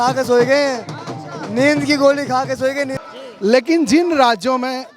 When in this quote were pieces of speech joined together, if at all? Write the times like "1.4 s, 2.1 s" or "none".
3.0 s